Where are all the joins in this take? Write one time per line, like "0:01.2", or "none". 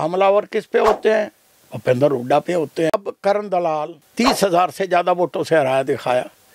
0:03.0